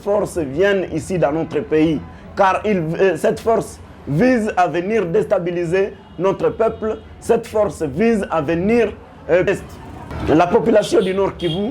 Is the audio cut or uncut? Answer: cut